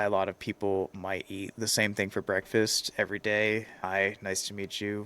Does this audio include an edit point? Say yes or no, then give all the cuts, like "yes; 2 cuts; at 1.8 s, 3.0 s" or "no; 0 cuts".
yes; 1 cut; at 3.7 s